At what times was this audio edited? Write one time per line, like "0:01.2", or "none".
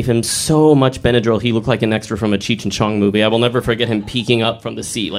none